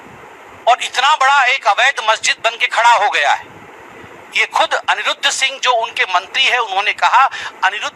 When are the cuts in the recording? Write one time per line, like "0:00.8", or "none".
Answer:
none